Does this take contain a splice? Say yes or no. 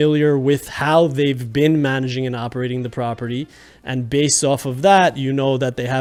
no